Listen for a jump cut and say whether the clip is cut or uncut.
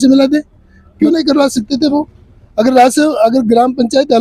cut